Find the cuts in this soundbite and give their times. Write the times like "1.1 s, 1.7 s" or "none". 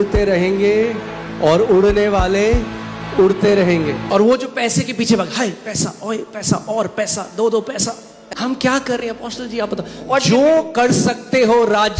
4.0 s, 8.1 s